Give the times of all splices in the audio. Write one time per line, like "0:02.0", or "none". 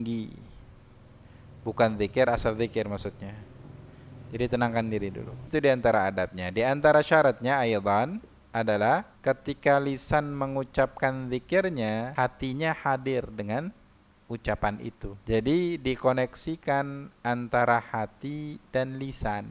0:05.4
0:09.1
0:12.1
0:15.1